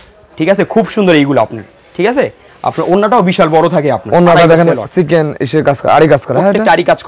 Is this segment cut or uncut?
uncut